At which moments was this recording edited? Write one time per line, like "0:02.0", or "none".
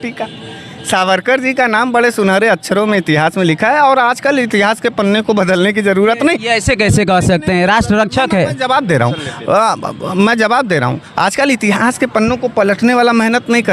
none